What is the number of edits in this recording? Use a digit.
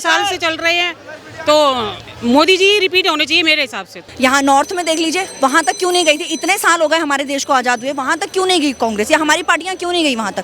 1